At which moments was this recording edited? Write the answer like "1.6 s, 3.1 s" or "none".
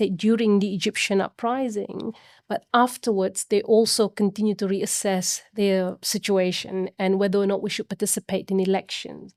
none